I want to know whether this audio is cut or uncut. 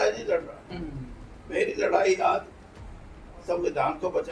uncut